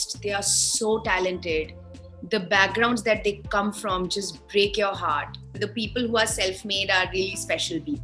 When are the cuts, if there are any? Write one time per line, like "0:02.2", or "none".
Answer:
0:05.6

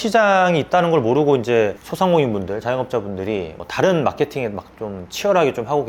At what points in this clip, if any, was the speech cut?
none

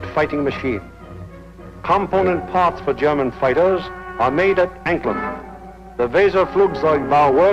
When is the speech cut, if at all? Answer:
0:04.8

